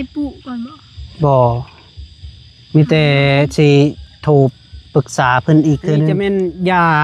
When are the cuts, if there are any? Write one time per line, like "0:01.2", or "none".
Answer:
0:06.1